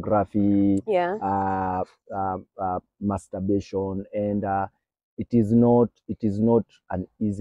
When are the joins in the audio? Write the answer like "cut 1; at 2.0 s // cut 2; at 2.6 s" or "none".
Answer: none